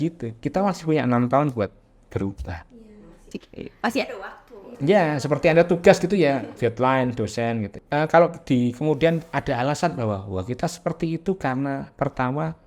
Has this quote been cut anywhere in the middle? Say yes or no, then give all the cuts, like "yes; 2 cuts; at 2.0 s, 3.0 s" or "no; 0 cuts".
yes; 1 cut; at 7.8 s